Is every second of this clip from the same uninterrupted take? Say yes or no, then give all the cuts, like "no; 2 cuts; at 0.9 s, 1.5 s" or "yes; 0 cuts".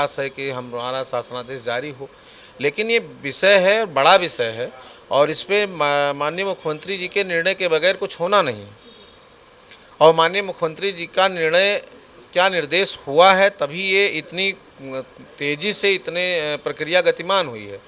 yes; 0 cuts